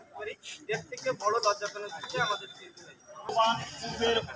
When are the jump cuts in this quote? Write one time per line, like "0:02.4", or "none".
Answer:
0:03.3